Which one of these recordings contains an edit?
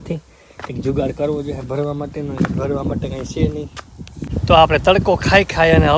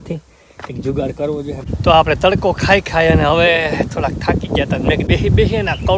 second; 2 cuts; at 1.6 s, 5.1 s

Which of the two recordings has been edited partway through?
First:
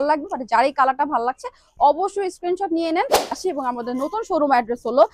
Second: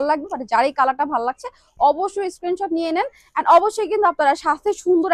first; 1 cut; at 3.3 s

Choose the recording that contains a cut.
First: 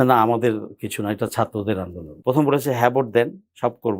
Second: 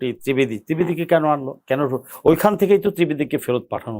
first; 1 cut; at 2.1 s

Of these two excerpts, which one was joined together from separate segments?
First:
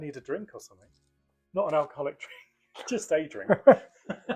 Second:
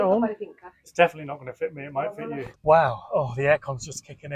second; 1 cut; at 2.5 s

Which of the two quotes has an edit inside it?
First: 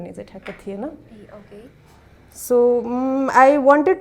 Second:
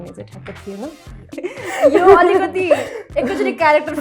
second; 1 cut; at 1.4 s

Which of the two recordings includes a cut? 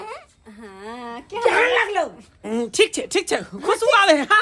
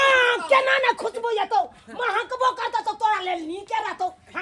first; 1 cut; at 2.4 s

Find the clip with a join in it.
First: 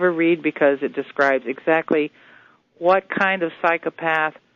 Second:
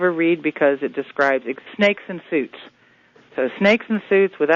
first; 1 cut; at 1.6 s

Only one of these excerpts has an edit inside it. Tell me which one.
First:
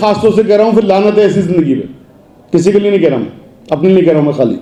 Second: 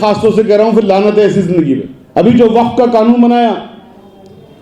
second; 1 cut; at 2.0 s

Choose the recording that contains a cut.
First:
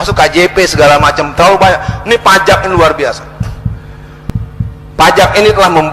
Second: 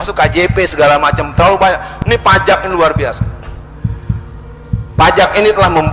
first; 2 cuts; at 3.2 s, 5.0 s

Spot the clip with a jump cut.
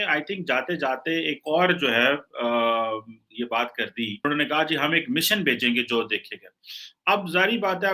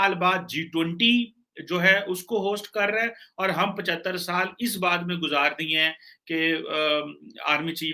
first; 1 cut; at 4.2 s

